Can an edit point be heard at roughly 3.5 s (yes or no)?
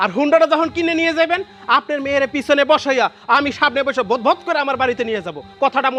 no